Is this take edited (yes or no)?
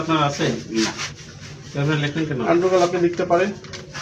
no